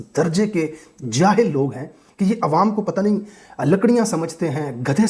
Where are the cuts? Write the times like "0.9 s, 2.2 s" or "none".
none